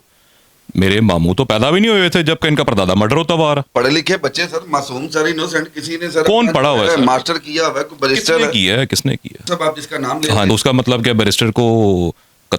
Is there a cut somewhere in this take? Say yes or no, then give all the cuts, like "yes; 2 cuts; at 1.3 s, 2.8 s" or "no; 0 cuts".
yes; 3 cuts; at 3.7 s, 9.3 s, 10.5 s